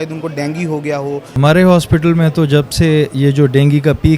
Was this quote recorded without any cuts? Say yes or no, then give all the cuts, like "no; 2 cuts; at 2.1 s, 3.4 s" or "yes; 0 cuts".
no; 1 cut; at 1.3 s